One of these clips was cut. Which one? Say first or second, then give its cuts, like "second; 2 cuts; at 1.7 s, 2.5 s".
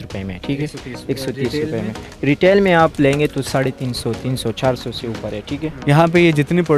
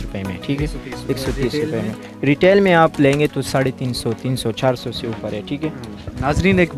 first; 1 cut; at 5.7 s